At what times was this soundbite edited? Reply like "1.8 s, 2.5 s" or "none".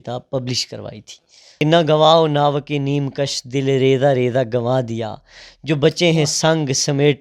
1.4 s